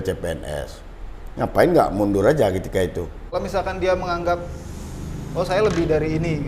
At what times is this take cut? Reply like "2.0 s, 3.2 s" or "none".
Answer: 3.0 s